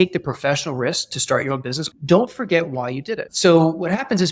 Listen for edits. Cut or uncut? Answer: cut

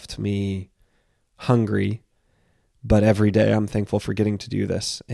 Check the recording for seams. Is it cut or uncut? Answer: uncut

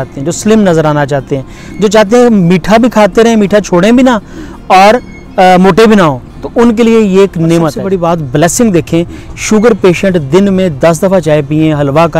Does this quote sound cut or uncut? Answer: cut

